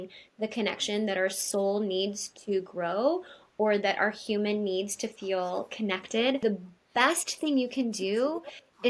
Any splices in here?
yes; 1 cut; at 6.4 s

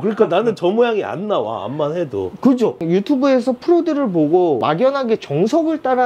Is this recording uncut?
yes; 0 cuts

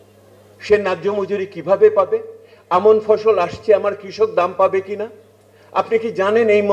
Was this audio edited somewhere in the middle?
no; 0 cuts

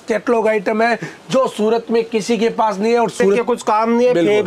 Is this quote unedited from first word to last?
no; 1 cut; at 3.4 s

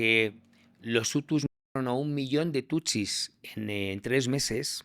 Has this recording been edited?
no; 0 cuts

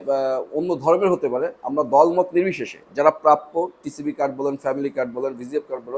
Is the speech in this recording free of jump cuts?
yes; 0 cuts

